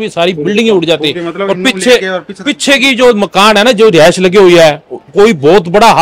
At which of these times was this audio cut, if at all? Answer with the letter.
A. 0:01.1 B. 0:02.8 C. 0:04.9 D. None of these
D